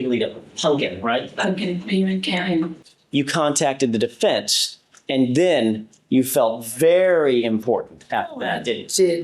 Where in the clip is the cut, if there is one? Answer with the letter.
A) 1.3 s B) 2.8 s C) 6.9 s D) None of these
B